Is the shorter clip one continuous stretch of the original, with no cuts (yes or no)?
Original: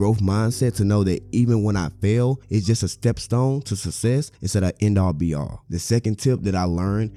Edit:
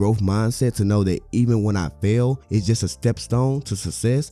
yes